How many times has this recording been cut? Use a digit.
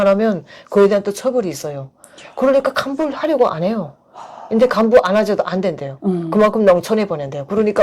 0